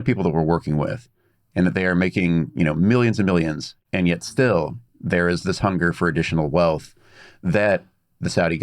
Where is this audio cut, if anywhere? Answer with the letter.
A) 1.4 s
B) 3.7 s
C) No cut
B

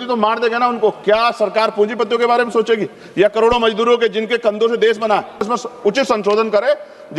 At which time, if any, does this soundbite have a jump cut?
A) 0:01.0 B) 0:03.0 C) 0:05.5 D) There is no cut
C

